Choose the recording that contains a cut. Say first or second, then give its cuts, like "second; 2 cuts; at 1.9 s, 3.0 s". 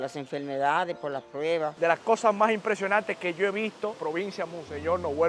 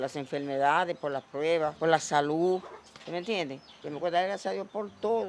first; 2 cuts; at 1.7 s, 4.0 s